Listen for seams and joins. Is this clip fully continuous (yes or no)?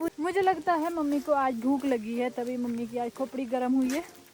yes